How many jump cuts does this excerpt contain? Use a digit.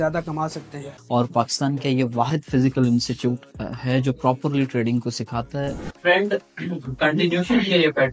2